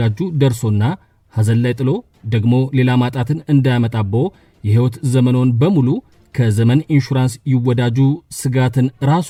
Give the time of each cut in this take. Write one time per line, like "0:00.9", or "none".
none